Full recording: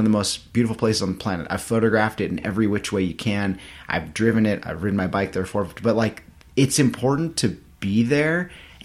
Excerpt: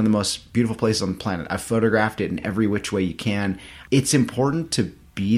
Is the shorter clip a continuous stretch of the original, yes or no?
no